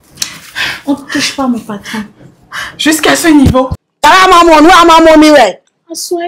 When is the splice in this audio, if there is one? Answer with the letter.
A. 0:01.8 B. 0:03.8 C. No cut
B